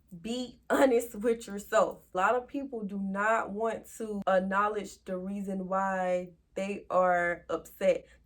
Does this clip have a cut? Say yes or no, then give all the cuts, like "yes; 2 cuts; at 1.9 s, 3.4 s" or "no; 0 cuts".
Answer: yes; 2 cuts; at 2.1 s, 4.2 s